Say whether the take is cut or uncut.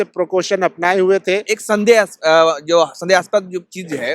cut